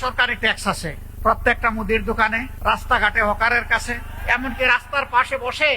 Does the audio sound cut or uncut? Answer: cut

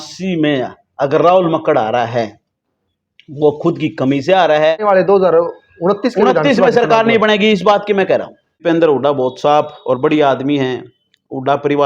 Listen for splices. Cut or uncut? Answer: cut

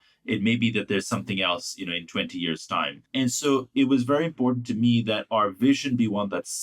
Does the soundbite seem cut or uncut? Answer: cut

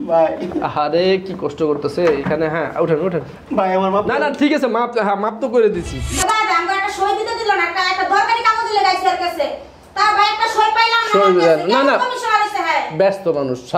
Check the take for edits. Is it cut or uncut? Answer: cut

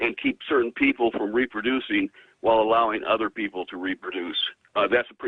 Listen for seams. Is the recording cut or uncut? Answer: cut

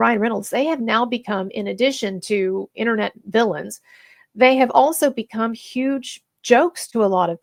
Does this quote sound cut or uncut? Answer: uncut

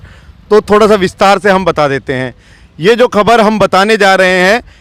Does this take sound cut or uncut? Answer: uncut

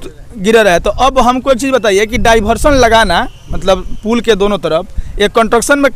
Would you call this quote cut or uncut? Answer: uncut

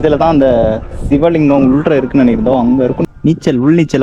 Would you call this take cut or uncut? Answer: cut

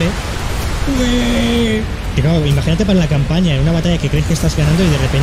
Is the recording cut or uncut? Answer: uncut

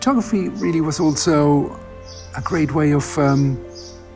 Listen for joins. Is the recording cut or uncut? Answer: uncut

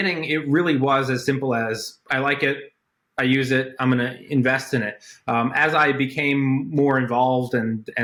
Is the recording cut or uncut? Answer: uncut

